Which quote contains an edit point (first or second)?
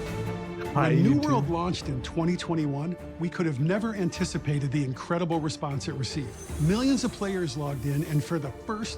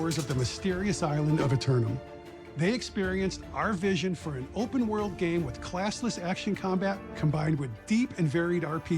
second